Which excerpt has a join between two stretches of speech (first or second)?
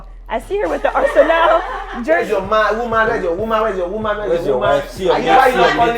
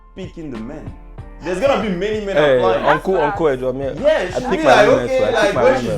first